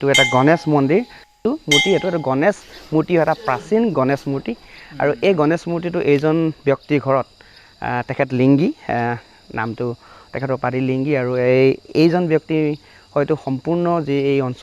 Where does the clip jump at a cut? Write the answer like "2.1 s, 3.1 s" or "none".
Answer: 1.4 s